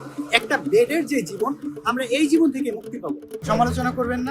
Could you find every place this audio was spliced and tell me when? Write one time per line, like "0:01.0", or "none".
0:03.3